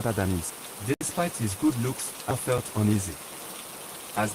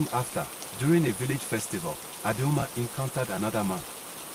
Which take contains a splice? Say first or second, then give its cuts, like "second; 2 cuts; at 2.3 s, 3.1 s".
first; 2 cuts; at 1.1 s, 2.4 s